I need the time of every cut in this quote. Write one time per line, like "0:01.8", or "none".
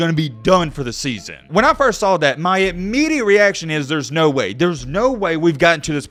none